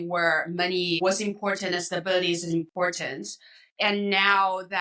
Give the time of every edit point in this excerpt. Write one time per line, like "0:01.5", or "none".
0:01.0